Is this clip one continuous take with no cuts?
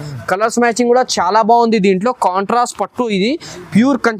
yes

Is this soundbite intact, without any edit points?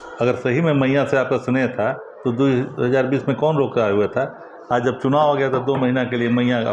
yes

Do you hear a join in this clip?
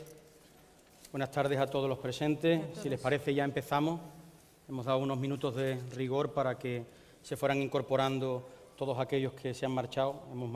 no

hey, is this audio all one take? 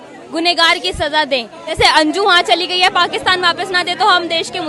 no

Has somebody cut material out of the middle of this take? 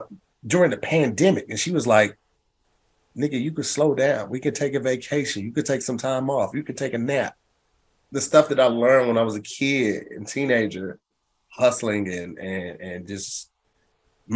yes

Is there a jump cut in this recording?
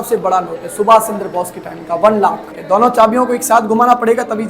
yes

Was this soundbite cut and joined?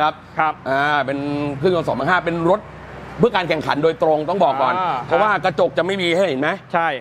no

